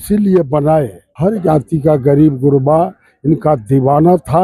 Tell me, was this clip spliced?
yes; 1 cut; at 1.0 s

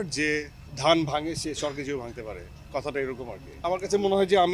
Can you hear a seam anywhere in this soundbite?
yes; 1 cut; at 3.6 s

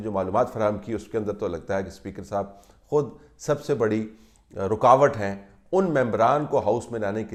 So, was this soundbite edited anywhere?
no; 0 cuts

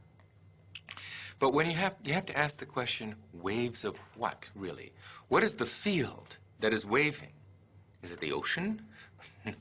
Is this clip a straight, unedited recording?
yes; 0 cuts

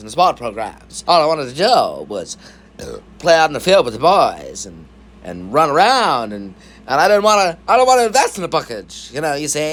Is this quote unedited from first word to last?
yes; 0 cuts

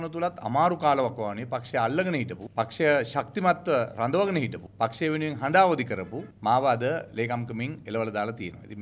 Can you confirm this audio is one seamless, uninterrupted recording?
yes; 0 cuts

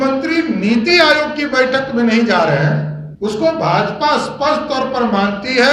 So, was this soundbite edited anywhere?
yes; 1 cut; at 3.0 s

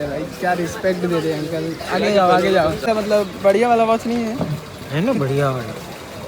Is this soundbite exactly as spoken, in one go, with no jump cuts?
no; 1 cut; at 2.8 s

